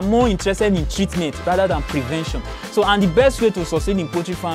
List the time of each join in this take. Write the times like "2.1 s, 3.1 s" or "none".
none